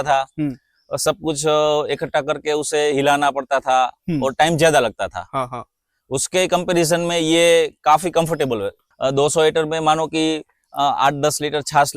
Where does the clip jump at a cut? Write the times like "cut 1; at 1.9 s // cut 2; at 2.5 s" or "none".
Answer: cut 1; at 8.8 s